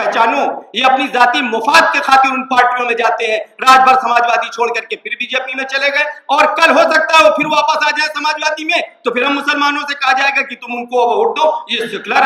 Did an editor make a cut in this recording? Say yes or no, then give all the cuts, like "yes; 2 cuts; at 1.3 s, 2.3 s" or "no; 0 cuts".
no; 0 cuts